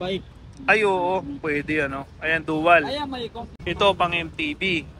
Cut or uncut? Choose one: cut